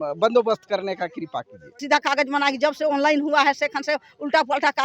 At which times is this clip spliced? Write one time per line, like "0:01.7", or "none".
0:01.8